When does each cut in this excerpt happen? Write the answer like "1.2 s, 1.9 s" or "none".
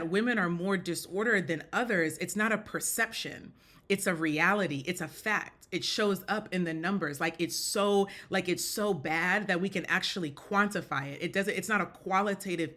none